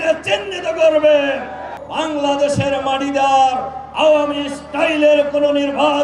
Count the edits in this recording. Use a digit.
1